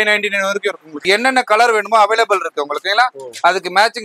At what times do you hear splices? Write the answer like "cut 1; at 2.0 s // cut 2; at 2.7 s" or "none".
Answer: cut 1; at 1.0 s